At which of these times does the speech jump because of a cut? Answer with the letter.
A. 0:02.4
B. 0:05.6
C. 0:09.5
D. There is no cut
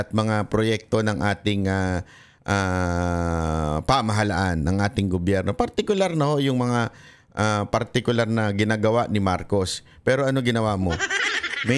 D